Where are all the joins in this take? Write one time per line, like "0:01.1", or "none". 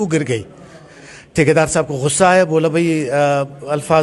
none